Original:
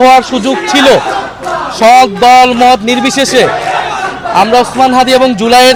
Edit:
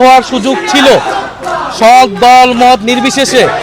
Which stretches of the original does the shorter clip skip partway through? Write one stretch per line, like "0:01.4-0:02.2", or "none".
none